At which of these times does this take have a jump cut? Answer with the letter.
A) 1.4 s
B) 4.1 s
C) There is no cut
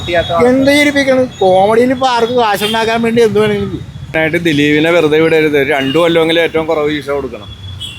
B